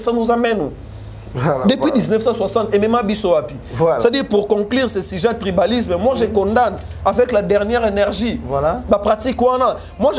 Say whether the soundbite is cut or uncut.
uncut